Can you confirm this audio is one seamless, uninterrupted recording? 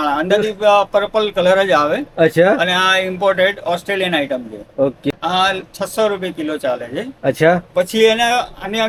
yes; 0 cuts

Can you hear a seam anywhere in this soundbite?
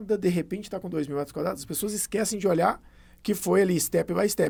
no; 0 cuts

